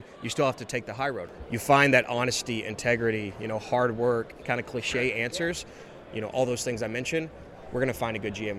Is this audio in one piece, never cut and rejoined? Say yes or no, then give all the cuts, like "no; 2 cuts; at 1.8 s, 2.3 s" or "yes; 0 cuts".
no; 3 cuts; at 1.2 s, 4.4 s, 5.8 s